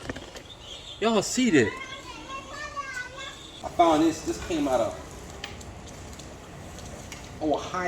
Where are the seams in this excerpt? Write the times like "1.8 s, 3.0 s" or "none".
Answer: 3.4 s